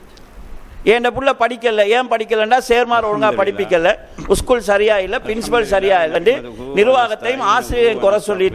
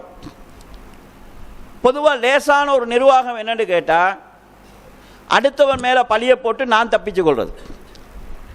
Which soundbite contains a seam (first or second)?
first